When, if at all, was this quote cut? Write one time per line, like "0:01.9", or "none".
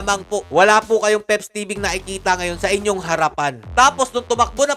0:03.6